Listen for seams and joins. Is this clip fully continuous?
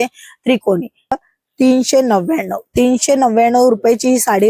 no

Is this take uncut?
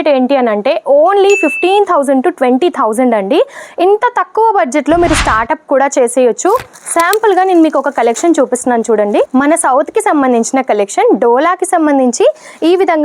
no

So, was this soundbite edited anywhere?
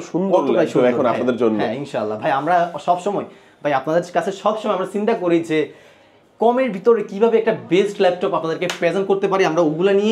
no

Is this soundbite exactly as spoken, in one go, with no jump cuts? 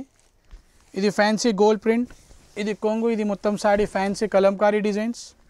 yes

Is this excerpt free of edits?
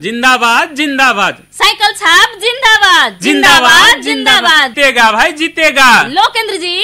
no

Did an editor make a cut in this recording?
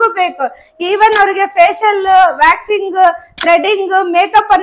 no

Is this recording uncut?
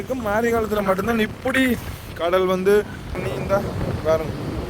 no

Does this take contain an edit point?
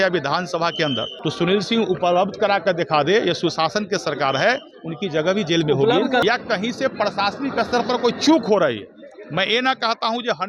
yes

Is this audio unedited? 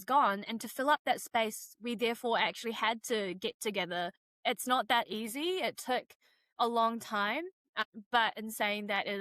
yes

